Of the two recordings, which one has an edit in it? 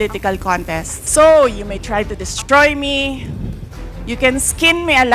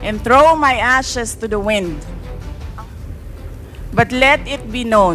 first; 1 cut; at 1.0 s

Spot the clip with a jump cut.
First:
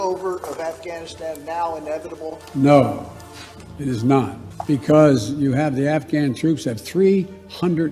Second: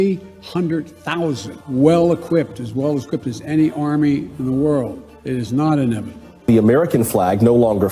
second; 1 cut; at 6.5 s

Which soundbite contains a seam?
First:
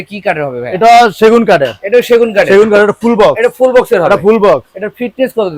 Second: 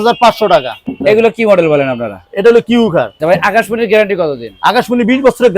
second; 2 cuts; at 0.8 s, 3.1 s

